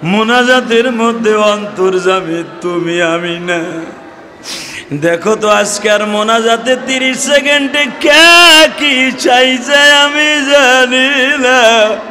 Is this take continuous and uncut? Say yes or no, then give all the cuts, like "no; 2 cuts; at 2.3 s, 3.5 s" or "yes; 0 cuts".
yes; 0 cuts